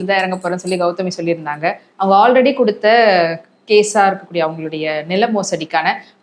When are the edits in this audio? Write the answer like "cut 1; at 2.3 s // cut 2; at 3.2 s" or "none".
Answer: none